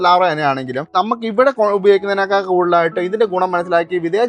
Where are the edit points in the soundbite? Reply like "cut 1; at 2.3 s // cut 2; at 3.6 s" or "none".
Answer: cut 1; at 0.9 s